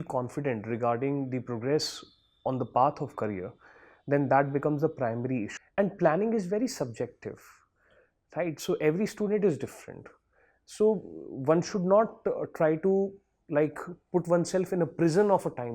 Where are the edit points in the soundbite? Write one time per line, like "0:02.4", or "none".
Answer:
0:05.6